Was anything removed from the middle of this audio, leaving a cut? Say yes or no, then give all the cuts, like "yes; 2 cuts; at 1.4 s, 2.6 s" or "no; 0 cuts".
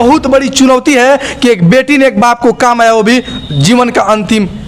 no; 0 cuts